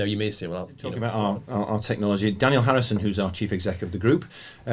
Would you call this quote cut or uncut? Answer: cut